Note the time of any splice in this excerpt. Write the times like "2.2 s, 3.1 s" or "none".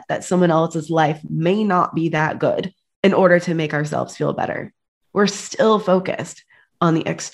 none